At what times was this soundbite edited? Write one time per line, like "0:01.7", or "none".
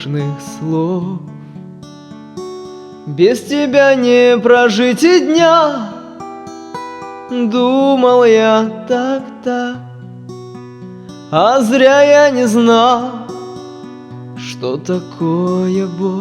0:11.3
0:13.2
0:14.6